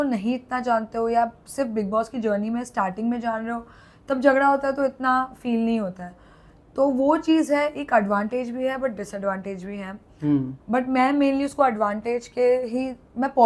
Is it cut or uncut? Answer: uncut